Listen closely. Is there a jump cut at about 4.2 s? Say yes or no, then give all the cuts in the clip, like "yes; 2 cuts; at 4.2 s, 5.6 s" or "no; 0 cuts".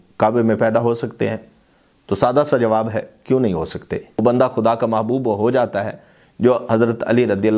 yes; 1 cut; at 4.2 s